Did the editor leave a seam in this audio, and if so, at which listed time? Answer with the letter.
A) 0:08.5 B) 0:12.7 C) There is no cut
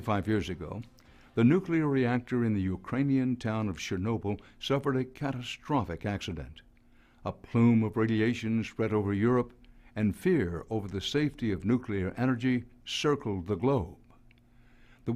A